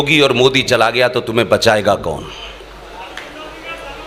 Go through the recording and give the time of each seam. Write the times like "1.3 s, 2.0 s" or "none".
none